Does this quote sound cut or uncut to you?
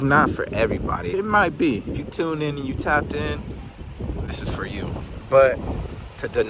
cut